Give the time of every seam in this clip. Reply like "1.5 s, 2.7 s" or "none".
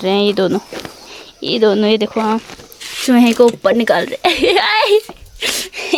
none